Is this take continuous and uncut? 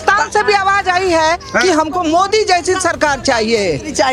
yes; 0 cuts

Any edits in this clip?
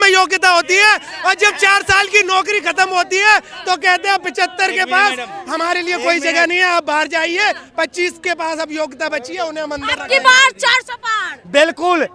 no; 0 cuts

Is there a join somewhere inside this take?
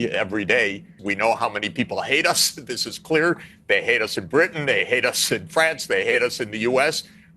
yes; 1 cut; at 1.0 s

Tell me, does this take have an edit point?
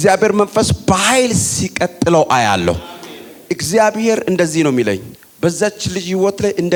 no; 0 cuts

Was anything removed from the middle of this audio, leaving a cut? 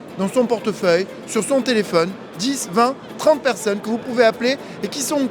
no; 0 cuts

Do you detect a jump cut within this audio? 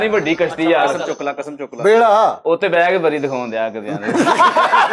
no; 0 cuts

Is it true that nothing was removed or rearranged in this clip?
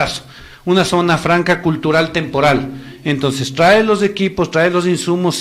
yes; 0 cuts

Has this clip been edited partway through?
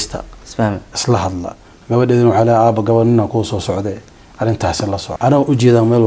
yes; 1 cut; at 5.1 s

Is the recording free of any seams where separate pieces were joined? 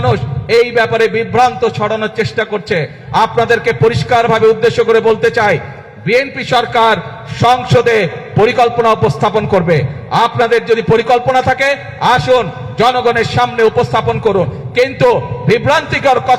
yes; 0 cuts

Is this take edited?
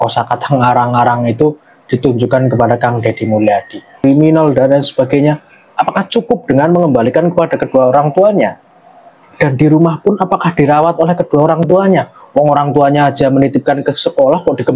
yes; 1 cut; at 4.0 s

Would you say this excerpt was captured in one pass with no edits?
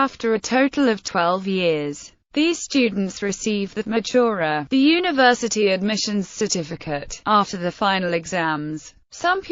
yes; 0 cuts

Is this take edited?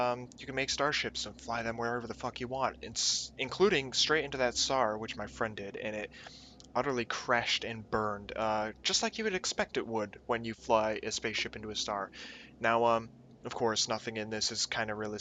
no; 0 cuts

